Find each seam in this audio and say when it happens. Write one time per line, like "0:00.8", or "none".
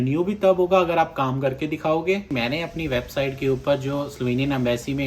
0:02.3